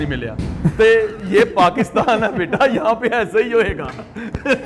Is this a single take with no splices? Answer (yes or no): yes